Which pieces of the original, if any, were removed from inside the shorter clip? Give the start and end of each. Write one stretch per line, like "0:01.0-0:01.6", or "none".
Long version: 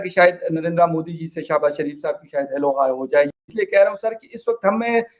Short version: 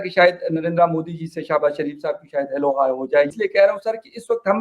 0:03.3-0:03.5